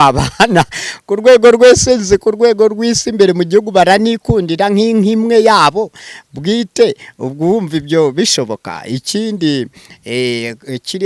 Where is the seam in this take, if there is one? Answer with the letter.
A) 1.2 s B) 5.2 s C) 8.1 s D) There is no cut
D